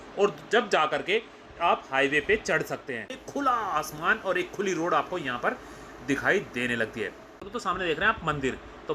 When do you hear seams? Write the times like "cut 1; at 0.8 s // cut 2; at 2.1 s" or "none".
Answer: cut 1; at 3.2 s // cut 2; at 7.5 s